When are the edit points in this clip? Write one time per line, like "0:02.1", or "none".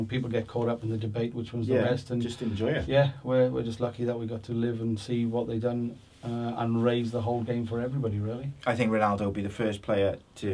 none